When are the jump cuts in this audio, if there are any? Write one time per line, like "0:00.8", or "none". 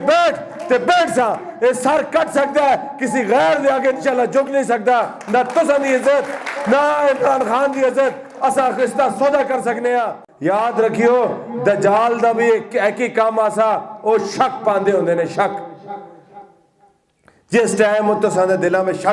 0:10.2